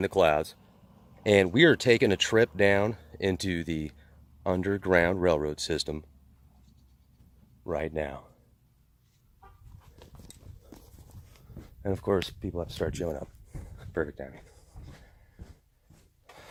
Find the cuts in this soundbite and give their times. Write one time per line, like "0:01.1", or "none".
none

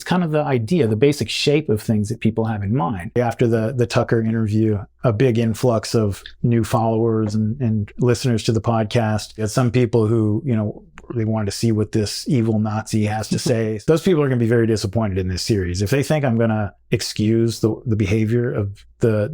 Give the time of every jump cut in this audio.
0:03.2
0:09.4
0:13.8

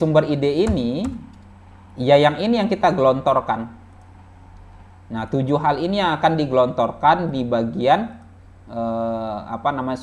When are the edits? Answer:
none

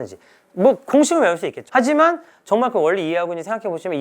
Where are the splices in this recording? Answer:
0:01.5

